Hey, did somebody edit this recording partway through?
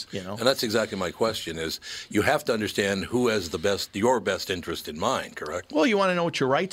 no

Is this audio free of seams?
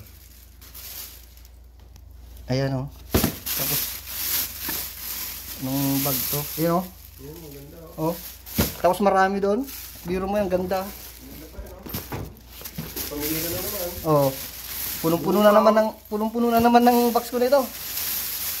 yes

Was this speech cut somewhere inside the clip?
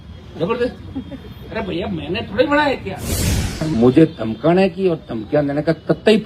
yes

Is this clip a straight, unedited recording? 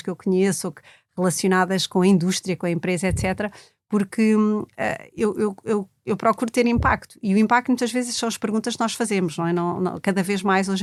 yes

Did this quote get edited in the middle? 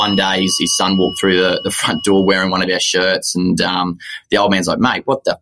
no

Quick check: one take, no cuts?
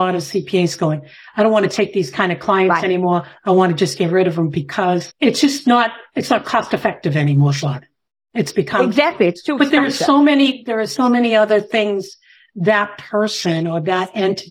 no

